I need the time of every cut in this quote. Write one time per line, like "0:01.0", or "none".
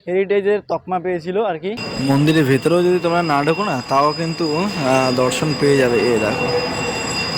0:01.8